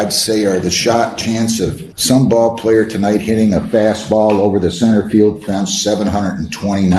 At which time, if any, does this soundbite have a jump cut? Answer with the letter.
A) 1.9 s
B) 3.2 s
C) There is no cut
A